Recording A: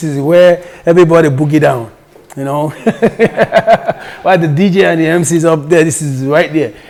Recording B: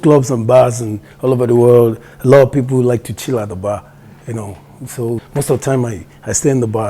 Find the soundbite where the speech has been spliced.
B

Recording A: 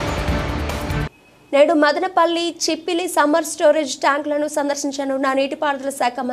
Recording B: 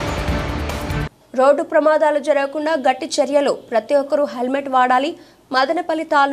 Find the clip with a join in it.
B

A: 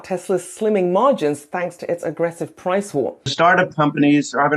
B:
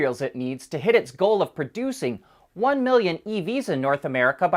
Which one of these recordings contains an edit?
A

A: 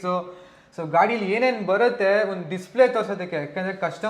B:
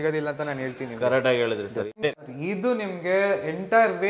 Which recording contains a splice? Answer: B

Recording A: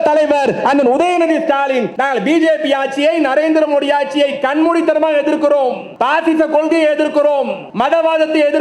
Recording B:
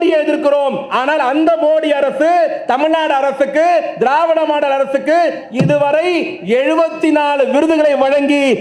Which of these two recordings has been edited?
A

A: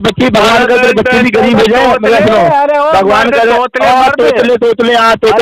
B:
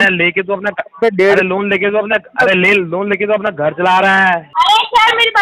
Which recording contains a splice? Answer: B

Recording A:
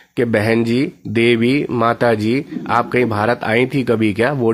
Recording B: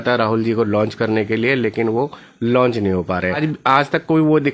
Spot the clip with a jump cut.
B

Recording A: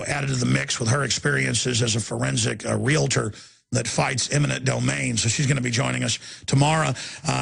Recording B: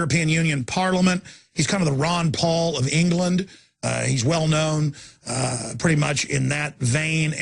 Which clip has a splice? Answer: B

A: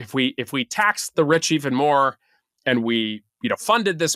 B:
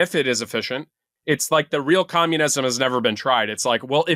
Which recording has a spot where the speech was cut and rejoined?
A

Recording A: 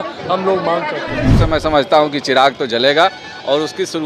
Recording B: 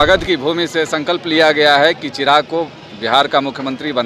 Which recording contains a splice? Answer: A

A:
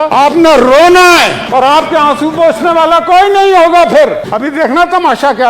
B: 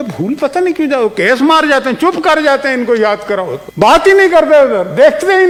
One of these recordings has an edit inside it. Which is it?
A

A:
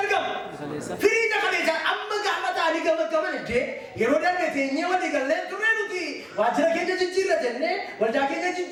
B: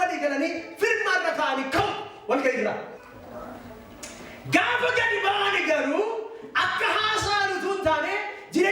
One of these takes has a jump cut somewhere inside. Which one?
B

